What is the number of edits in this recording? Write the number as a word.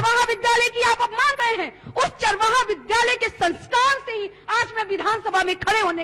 one